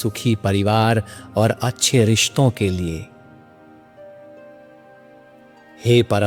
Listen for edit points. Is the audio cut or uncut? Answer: uncut